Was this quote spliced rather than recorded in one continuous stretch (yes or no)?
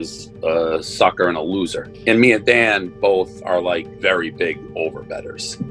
no